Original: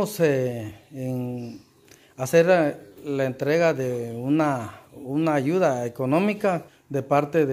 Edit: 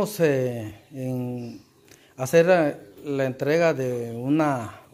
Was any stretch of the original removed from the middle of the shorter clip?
no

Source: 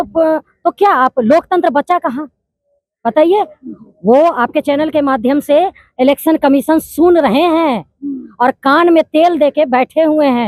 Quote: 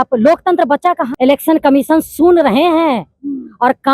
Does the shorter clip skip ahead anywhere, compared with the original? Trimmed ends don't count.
yes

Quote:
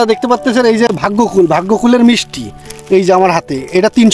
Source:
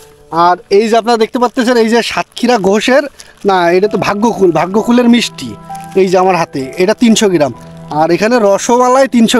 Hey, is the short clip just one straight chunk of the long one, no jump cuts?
no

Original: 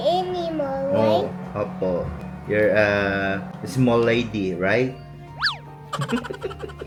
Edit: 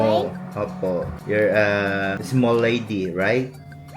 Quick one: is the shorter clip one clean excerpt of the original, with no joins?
no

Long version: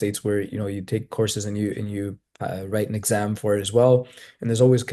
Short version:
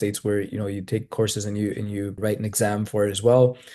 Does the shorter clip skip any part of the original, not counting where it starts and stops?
yes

